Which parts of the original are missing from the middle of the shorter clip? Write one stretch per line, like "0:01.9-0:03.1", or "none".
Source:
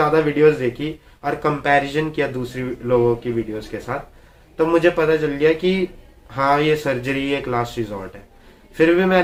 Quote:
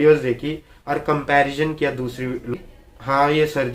0:02.9-0:05.8